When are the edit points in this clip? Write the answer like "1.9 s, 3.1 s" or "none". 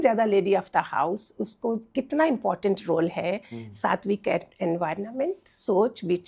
none